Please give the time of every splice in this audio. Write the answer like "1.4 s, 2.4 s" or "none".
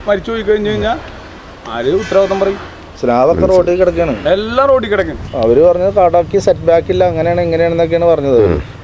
5.2 s